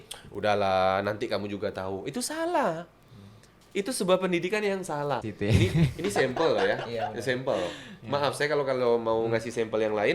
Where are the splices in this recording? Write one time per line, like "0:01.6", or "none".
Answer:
0:05.3